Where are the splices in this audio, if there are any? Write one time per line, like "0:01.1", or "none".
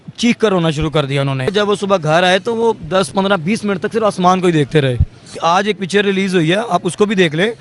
0:01.5
0:05.3